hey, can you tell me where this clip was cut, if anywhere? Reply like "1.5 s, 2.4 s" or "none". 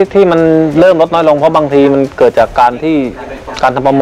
none